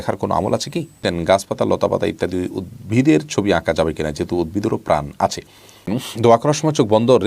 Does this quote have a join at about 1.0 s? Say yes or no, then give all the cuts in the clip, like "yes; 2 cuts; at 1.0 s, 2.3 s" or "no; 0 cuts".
yes; 2 cuts; at 1.0 s, 5.9 s